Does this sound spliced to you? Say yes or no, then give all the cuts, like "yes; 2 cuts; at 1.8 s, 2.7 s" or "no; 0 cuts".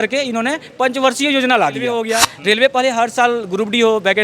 yes; 1 cut; at 2.0 s